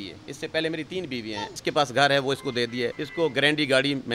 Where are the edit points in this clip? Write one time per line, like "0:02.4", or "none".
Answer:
0:01.5
0:03.0